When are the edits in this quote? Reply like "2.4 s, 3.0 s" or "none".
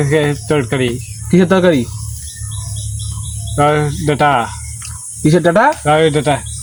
none